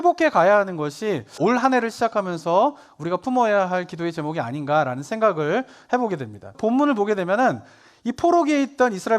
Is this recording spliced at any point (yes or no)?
yes